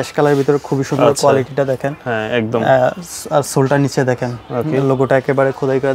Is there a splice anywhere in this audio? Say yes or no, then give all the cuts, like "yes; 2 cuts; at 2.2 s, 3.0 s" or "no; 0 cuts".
no; 0 cuts